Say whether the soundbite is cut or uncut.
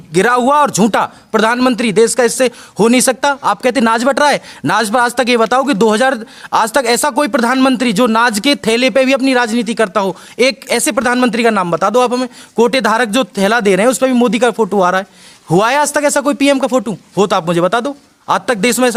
uncut